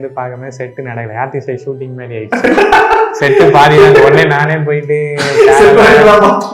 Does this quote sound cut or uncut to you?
uncut